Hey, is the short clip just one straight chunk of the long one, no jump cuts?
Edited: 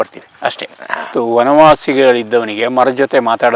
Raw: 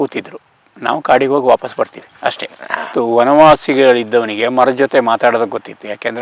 yes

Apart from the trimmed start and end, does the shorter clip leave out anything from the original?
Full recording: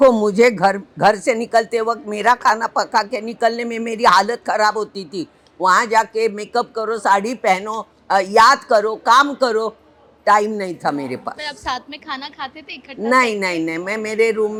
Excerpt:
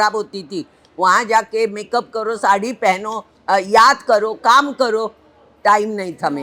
no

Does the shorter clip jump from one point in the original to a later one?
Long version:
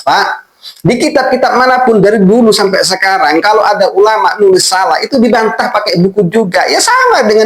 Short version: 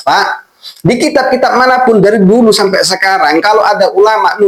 no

